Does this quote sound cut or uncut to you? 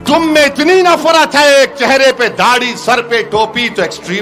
uncut